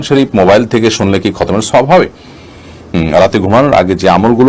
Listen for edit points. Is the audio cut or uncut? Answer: cut